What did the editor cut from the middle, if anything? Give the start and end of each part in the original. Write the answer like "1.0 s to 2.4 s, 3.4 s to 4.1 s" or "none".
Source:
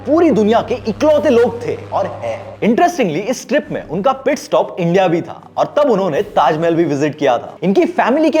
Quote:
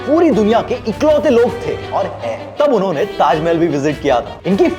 2.5 s to 5.7 s